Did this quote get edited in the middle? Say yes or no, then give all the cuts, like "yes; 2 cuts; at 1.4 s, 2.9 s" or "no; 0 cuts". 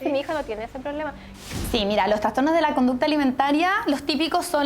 yes; 1 cut; at 1.4 s